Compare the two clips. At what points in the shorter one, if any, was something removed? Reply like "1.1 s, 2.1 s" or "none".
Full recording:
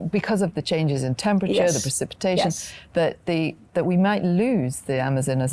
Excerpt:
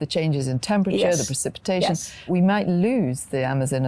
2.3 s